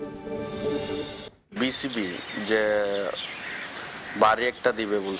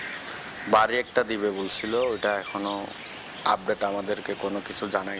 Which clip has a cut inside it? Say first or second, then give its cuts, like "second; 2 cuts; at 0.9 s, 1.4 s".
first; 1 cut; at 1.1 s